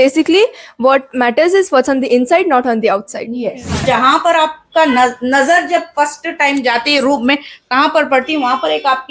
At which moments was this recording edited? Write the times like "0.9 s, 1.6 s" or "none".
3.8 s